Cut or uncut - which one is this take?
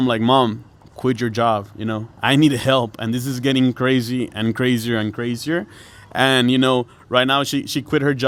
uncut